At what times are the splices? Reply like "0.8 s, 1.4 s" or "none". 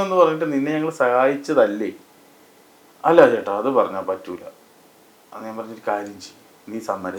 none